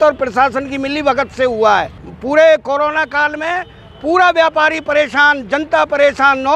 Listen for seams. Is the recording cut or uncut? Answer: cut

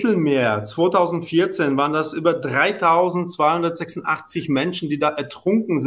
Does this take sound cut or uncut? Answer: uncut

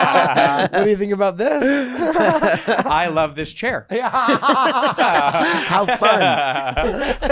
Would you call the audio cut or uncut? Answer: uncut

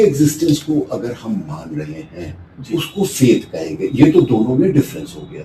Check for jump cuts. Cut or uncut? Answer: uncut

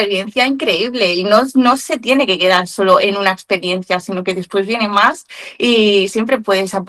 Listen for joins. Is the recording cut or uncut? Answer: uncut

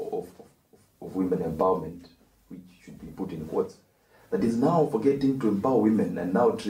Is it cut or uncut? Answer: uncut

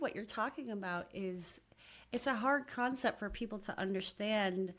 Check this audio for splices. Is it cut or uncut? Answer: uncut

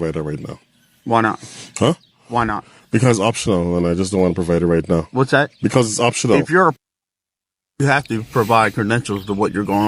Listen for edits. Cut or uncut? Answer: uncut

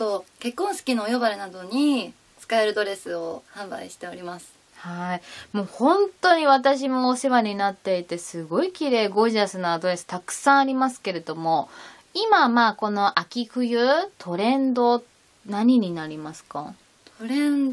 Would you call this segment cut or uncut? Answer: uncut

